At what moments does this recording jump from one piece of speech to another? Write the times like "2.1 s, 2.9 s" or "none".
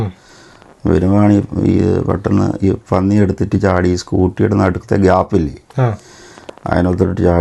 none